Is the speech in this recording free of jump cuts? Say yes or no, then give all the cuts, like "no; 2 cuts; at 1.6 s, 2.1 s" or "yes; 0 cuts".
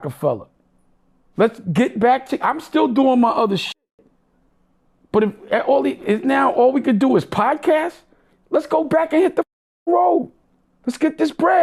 yes; 0 cuts